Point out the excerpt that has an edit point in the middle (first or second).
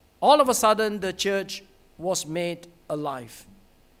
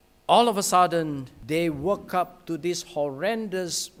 second